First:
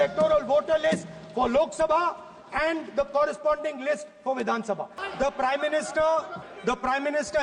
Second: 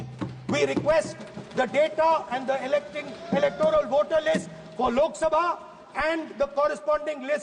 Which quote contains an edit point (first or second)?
first